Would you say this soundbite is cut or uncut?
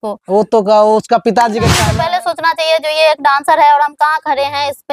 cut